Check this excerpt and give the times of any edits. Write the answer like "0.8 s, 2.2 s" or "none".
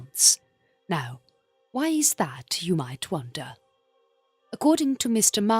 3.1 s